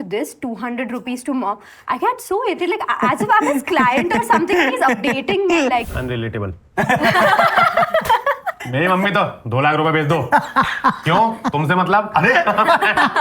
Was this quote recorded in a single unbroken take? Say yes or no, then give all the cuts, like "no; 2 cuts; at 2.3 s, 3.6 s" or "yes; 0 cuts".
no; 2 cuts; at 5.9 s, 8.5 s